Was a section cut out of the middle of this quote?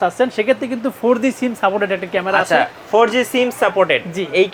no; 0 cuts

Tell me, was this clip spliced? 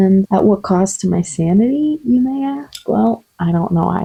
no; 0 cuts

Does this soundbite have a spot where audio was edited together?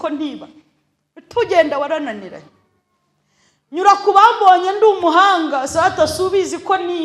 no; 0 cuts

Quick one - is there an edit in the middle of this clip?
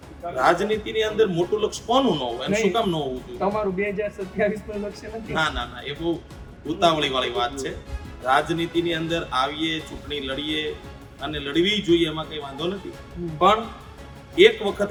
no; 0 cuts

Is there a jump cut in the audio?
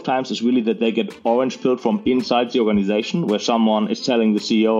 no; 0 cuts

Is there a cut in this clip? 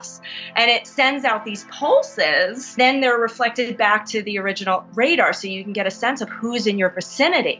yes; 1 cut; at 2.8 s

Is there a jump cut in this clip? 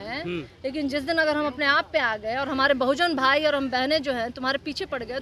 no; 0 cuts

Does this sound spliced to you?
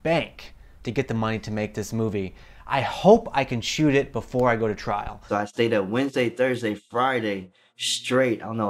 yes; 1 cut; at 5.2 s

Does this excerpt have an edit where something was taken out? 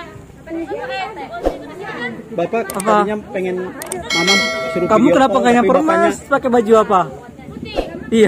yes; 1 cut; at 6.3 s

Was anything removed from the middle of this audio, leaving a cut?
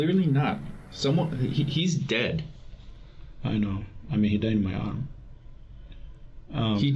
no; 0 cuts

